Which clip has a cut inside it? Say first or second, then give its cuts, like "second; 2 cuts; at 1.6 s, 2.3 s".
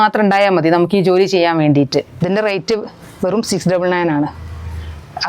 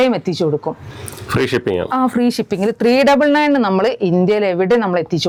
first; 1 cut; at 2.1 s